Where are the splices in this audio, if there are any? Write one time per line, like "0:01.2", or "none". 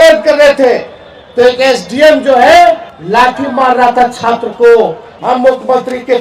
0:02.9
0:05.1